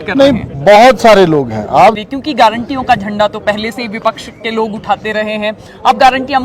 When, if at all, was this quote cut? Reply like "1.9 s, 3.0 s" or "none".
2.0 s